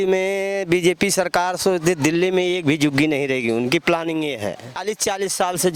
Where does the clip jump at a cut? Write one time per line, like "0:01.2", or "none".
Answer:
0:04.8